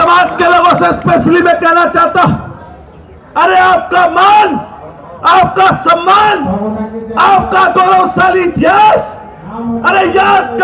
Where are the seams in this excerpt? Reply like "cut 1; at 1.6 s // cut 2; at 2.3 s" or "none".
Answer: none